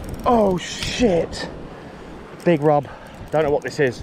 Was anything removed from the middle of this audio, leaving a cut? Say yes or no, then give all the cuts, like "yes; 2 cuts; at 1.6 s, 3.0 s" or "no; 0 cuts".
no; 0 cuts